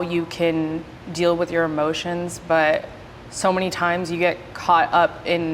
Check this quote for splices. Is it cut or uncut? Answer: uncut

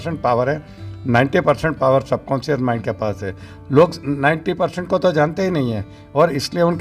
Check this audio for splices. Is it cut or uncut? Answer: uncut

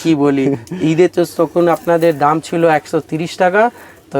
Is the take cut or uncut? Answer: uncut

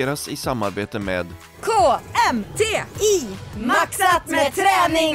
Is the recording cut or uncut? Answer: cut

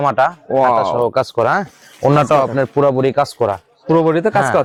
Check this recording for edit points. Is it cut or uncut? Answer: uncut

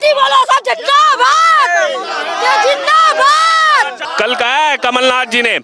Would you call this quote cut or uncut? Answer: cut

